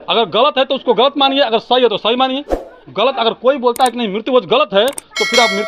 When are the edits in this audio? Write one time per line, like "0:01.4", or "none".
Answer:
none